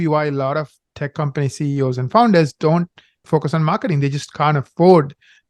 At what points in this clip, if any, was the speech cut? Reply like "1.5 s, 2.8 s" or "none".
3.2 s